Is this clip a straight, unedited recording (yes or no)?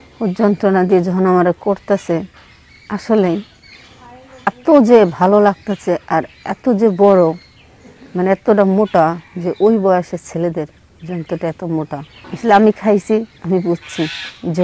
no